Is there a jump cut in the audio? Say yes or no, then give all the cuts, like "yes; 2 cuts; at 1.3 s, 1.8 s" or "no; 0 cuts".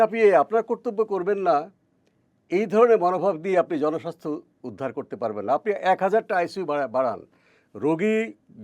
no; 0 cuts